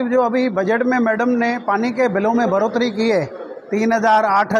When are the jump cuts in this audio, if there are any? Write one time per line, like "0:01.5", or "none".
none